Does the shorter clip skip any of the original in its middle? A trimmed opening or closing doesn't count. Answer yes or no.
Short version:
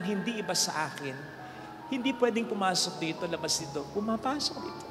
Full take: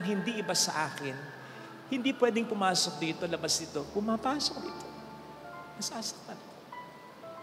no